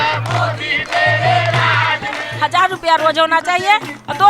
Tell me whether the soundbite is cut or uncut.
cut